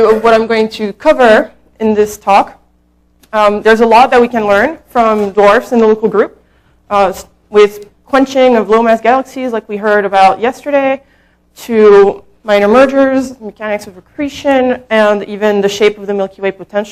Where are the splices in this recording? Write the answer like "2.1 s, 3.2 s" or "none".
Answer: none